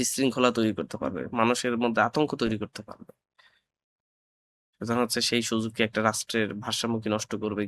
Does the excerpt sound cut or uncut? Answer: uncut